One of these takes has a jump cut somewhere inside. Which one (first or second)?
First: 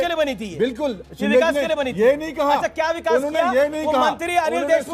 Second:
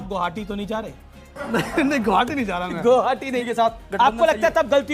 second